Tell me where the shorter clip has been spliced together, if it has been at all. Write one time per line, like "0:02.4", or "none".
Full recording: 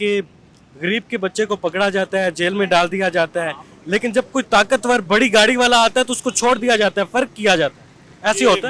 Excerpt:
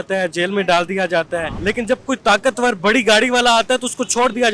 0:01.5